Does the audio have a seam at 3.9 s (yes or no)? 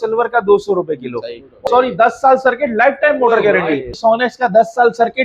yes